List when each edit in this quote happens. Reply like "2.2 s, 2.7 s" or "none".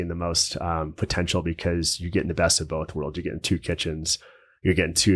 none

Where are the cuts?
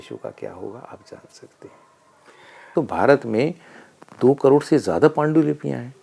2.7 s

